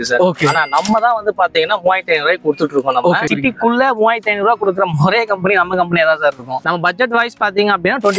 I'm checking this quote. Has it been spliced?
yes; 2 cuts; at 3.3 s, 6.6 s

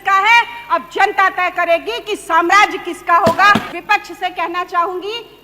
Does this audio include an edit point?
yes; 1 cut; at 3.7 s

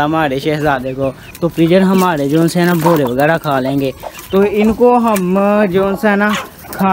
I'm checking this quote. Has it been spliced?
yes; 1 cut; at 1.2 s

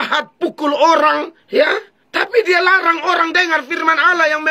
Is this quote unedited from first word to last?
no; 1 cut; at 1.6 s

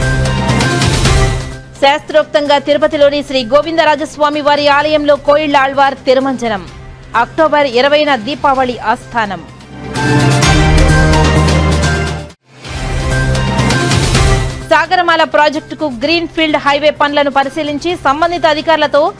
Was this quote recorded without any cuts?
no; 1 cut; at 1.4 s

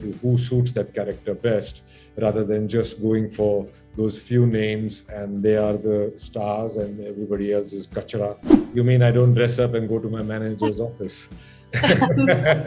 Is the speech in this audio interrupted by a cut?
yes; 1 cut; at 8.5 s

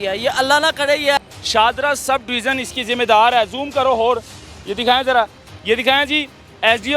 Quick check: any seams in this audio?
yes; 1 cut; at 1.2 s

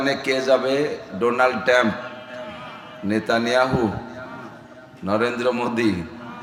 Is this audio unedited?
yes; 0 cuts

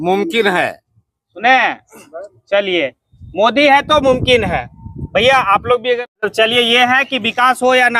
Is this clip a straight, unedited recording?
no; 1 cut; at 6.2 s

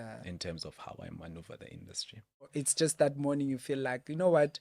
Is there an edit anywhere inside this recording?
yes; 1 cut; at 2.5 s

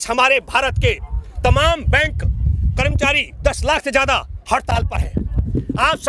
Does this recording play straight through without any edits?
yes; 0 cuts

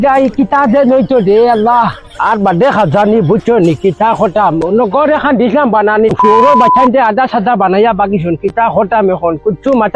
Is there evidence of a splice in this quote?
no; 0 cuts

